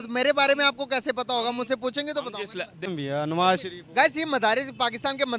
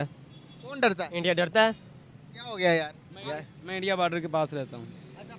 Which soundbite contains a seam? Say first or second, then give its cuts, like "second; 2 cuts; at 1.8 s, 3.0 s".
first; 1 cut; at 2.9 s